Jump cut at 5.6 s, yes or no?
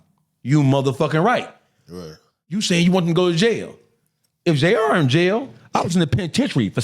yes